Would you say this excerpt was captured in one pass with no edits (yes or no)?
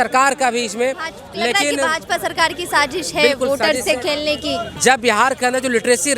no